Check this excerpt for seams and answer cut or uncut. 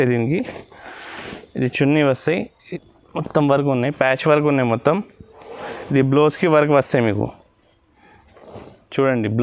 cut